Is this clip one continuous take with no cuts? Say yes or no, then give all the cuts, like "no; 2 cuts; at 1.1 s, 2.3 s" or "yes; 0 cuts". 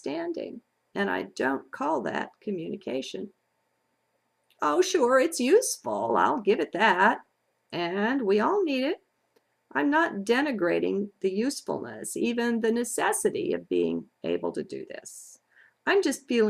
no; 1 cut; at 12.0 s